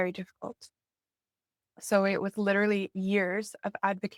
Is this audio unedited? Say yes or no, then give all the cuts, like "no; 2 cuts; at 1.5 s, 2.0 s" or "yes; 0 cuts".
yes; 0 cuts